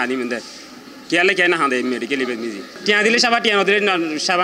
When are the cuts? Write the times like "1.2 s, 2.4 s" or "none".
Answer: 2.7 s